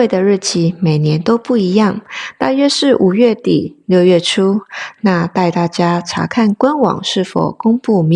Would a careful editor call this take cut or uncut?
uncut